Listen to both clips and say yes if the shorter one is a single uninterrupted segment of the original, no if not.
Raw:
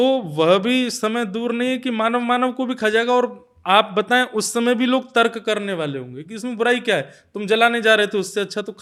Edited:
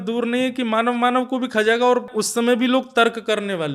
no